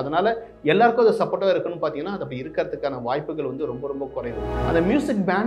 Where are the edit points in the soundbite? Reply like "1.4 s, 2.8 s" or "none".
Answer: 4.5 s